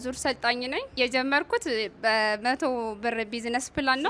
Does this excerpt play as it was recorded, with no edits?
no; 1 cut; at 0.9 s

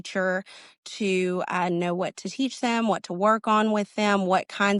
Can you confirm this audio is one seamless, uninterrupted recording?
yes; 0 cuts

